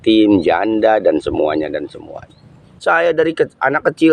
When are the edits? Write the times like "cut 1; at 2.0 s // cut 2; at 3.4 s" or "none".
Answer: cut 1; at 2.7 s